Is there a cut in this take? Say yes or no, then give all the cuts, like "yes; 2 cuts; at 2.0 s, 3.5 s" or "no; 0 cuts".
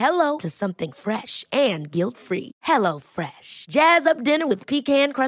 no; 0 cuts